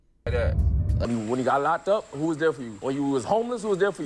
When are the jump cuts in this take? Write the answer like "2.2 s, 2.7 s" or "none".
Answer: 1.0 s, 2.7 s